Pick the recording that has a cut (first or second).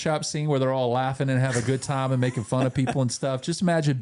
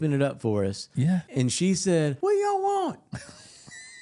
second